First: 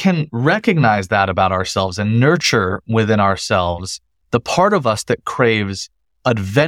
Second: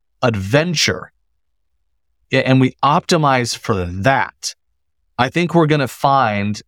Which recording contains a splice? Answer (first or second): second